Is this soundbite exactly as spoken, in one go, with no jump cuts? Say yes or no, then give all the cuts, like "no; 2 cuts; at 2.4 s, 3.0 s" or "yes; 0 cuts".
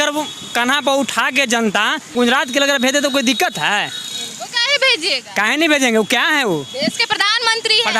no; 1 cut; at 2.1 s